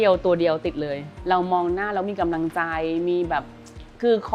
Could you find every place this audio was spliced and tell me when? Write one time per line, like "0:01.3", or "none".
0:01.1